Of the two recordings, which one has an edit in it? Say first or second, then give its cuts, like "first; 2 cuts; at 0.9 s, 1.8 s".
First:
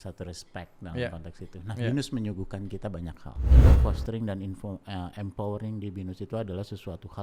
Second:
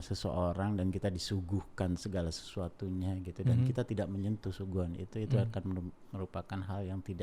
first; 1 cut; at 3.7 s